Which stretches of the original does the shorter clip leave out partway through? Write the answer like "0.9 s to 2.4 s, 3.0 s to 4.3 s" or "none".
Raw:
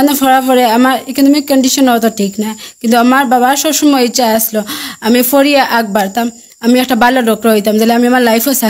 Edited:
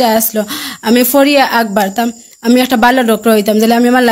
none